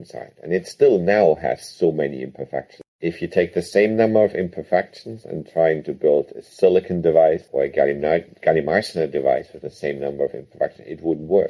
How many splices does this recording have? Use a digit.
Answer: 1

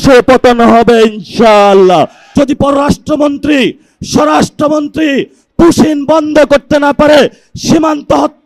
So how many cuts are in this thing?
1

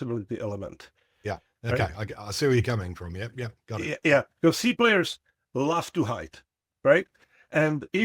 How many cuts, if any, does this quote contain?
0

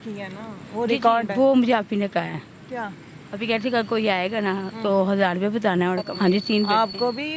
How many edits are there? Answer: 1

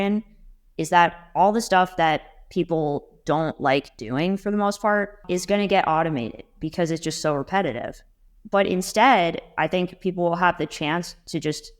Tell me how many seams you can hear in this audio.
1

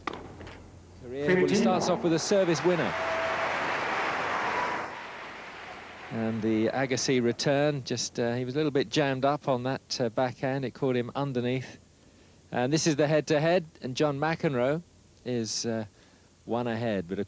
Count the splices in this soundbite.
0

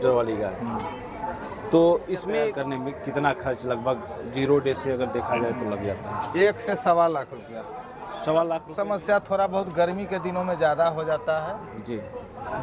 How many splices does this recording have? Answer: 2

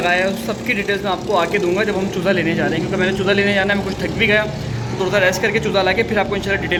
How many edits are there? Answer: 0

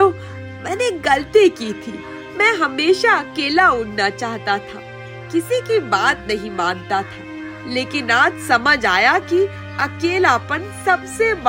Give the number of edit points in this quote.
0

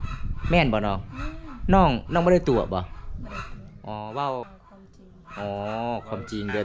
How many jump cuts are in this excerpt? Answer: 1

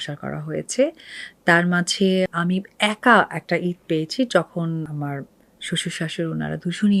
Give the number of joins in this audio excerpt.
2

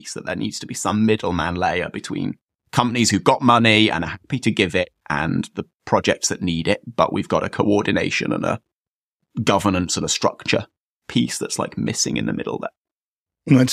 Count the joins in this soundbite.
0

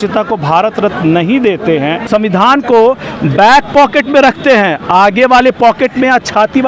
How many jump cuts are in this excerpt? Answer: 1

